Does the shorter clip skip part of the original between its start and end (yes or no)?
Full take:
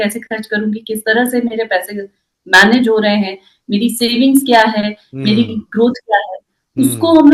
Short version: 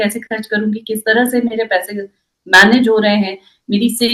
no